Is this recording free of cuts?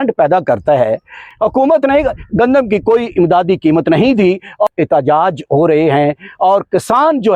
no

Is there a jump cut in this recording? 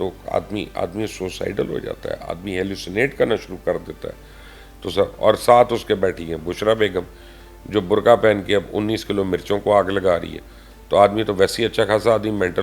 no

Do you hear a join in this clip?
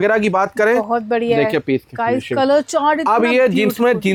no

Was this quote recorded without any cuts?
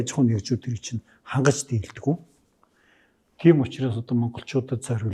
yes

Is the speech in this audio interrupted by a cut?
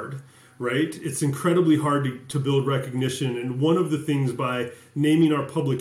no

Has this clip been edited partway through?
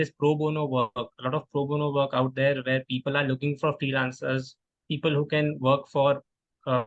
no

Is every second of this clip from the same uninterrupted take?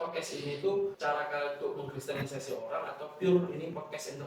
no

